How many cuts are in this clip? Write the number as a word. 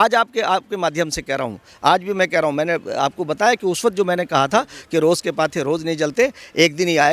zero